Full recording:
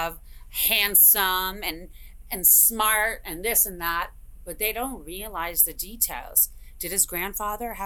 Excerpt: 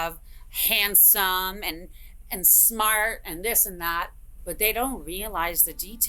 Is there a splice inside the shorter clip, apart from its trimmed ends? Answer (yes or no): no